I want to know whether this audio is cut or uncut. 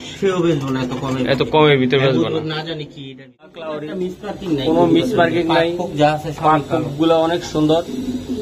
cut